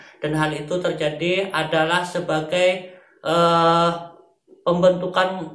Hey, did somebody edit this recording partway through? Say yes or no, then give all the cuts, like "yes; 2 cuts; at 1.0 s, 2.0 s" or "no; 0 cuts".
no; 0 cuts